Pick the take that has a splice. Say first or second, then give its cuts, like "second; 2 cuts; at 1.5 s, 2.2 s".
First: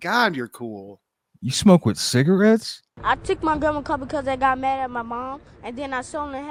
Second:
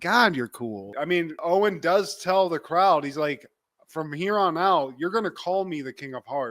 second; 1 cut; at 0.9 s